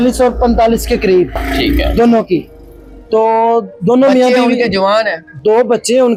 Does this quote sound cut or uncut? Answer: uncut